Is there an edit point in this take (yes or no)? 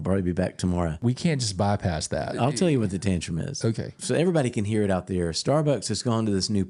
yes